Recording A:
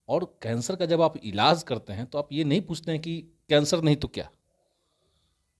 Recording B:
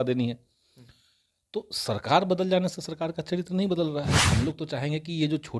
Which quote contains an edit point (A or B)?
B